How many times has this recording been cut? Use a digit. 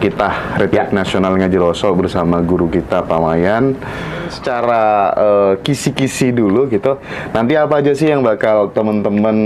1